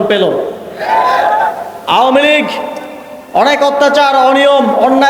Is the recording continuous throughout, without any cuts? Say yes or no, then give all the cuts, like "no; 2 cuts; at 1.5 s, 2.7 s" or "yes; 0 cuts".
no; 1 cut; at 1.7 s